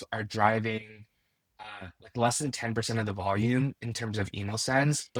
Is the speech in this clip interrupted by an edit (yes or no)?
no